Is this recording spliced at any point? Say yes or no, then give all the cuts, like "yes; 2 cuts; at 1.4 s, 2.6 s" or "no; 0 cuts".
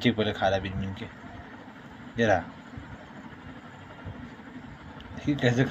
no; 0 cuts